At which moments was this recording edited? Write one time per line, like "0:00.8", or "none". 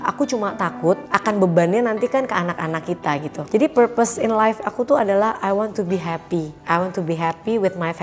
0:01.0
0:03.4
0:06.6